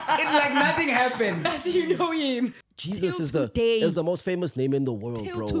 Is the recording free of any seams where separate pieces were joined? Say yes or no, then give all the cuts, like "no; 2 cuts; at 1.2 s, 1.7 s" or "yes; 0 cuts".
no; 1 cut; at 2.5 s